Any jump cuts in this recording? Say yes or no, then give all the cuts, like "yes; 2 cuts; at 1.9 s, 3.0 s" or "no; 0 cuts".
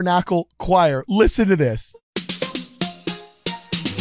yes; 1 cut; at 1.9 s